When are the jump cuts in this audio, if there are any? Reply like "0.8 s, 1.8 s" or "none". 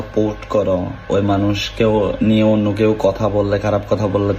1.0 s